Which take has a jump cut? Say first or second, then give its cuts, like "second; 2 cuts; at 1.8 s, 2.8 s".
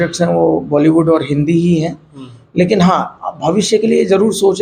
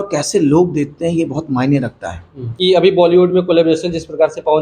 second; 1 cut; at 2.5 s